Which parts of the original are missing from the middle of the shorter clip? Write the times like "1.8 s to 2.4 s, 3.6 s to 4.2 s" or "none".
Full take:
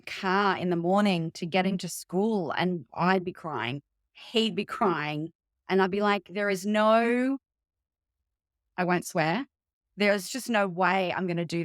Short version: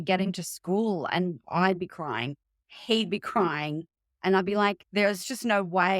6.3 s to 9.9 s